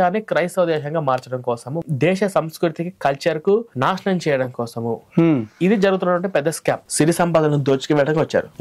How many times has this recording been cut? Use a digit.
2